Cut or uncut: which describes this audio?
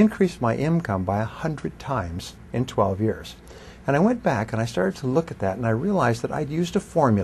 cut